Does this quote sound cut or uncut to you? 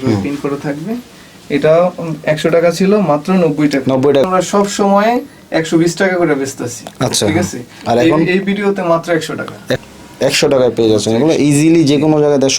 cut